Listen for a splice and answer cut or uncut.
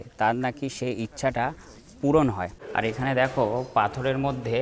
cut